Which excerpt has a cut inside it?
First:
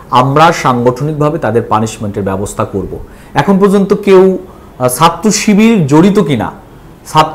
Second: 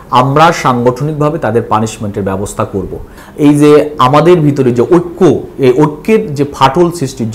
second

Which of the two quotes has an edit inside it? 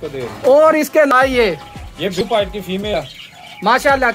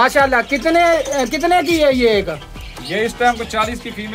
first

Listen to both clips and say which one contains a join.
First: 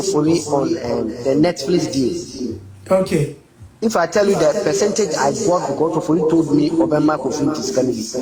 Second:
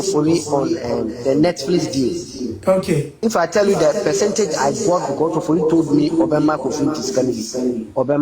second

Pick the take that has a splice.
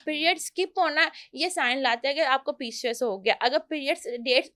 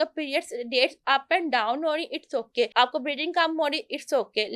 second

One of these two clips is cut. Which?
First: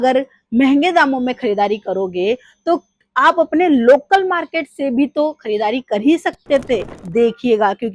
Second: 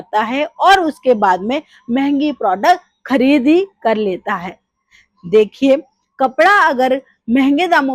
first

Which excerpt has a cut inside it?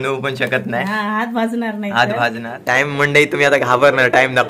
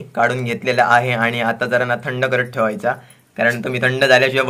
first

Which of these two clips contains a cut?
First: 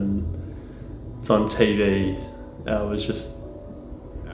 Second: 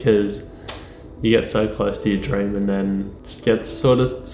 second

